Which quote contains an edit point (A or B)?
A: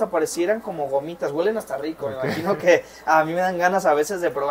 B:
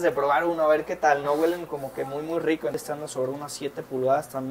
B